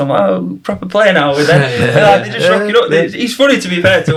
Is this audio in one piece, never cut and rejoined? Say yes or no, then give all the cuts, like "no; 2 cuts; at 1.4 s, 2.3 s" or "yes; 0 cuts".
yes; 0 cuts